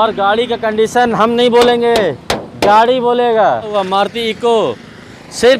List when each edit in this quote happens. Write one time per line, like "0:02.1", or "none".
0:03.7